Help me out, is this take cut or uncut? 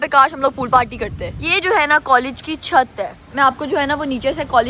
uncut